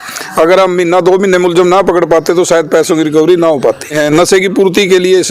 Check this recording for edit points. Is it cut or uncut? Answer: cut